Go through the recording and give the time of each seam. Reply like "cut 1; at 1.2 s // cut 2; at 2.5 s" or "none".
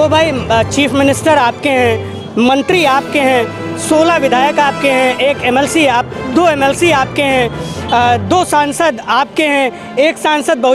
none